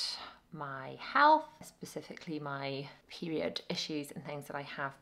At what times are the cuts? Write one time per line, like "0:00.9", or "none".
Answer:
none